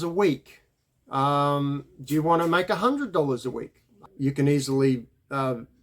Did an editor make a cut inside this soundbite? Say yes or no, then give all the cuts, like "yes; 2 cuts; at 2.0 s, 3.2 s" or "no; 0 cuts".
yes; 1 cut; at 4.0 s